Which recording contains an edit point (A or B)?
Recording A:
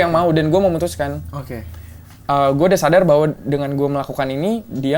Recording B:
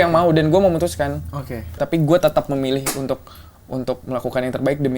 B